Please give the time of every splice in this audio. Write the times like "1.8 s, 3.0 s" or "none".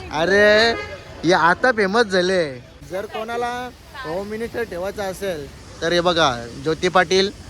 2.7 s